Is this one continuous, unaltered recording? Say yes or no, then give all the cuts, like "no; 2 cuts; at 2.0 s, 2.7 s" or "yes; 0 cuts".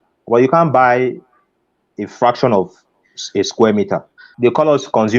no; 1 cut; at 4.2 s